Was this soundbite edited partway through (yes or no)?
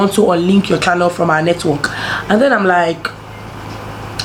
no